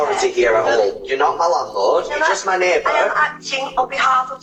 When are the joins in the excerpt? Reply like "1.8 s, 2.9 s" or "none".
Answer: none